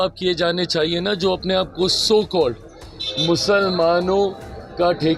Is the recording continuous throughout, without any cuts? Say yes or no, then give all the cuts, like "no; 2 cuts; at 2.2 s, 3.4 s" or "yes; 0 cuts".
yes; 0 cuts